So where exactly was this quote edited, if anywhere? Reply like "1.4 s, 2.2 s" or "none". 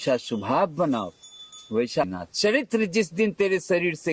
2.1 s